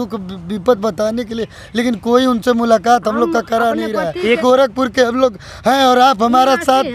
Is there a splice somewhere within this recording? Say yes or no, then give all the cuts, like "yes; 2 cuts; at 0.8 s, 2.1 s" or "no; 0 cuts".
yes; 1 cut; at 4.4 s